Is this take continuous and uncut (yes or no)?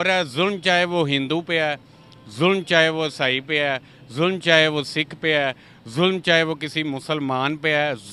yes